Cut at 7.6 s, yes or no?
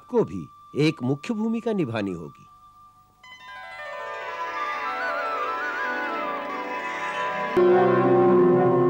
yes